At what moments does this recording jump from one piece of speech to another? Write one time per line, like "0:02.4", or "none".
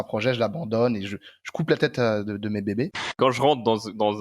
0:03.1